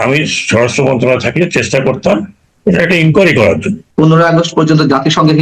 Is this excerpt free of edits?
no; 1 cut; at 3.8 s

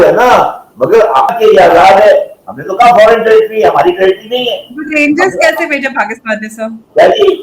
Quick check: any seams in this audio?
yes; 1 cut; at 1.3 s

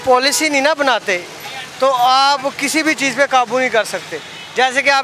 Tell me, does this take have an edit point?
no; 0 cuts

